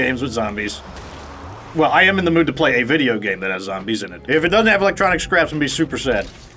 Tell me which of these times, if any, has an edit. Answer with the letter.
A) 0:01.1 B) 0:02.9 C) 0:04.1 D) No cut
C